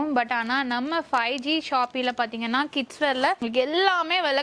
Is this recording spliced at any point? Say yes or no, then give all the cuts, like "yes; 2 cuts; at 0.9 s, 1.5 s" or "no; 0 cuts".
no; 0 cuts